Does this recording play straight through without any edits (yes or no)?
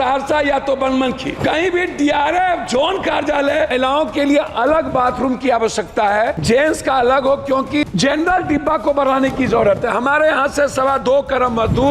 no